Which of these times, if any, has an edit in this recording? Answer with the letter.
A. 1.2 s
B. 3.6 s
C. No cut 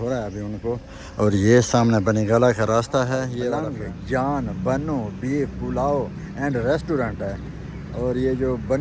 B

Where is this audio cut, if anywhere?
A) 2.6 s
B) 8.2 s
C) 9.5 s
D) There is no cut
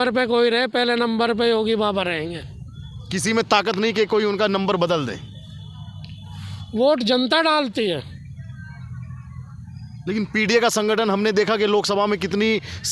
D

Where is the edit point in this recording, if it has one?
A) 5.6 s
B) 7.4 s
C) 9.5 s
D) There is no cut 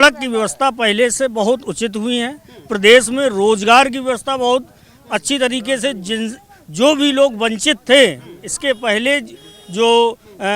D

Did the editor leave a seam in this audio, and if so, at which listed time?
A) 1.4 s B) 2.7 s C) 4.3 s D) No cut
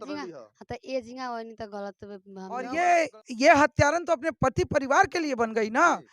B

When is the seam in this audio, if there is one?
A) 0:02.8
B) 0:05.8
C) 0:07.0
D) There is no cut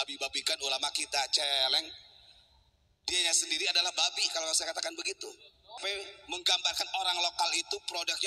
B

